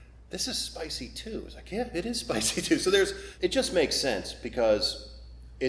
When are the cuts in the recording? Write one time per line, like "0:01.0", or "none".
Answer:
0:03.2